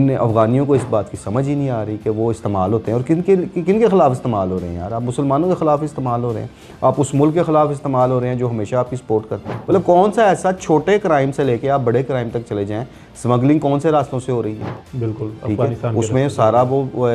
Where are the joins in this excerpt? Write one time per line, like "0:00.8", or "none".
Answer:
0:09.5